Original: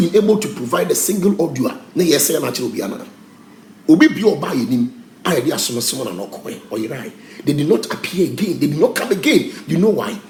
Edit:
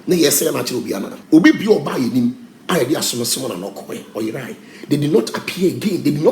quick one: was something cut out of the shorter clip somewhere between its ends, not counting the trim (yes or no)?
yes